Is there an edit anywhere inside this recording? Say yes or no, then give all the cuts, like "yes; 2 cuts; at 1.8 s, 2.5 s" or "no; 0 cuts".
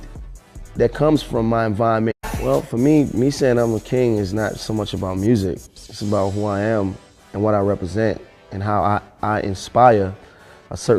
no; 0 cuts